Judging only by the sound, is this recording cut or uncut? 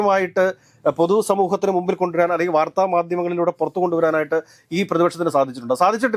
uncut